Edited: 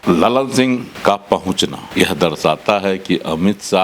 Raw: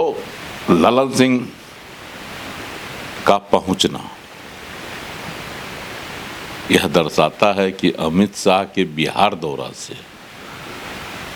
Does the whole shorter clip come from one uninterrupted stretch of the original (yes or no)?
no